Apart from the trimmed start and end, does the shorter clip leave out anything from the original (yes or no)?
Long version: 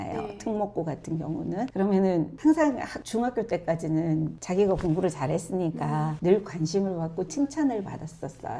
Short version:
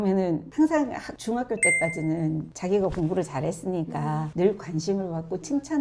no